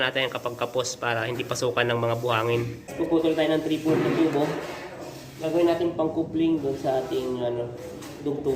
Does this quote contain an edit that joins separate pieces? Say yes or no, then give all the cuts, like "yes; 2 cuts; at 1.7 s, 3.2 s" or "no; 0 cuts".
yes; 1 cut; at 2.9 s